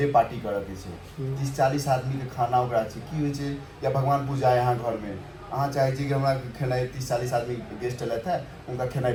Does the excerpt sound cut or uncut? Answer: uncut